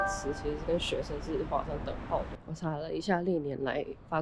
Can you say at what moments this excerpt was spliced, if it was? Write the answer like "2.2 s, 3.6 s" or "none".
2.4 s